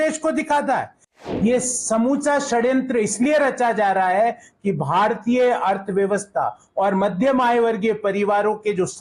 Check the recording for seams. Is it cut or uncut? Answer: cut